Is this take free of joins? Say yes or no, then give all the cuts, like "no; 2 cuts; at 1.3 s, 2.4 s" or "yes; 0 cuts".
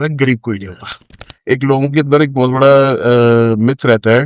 no; 1 cut; at 1.0 s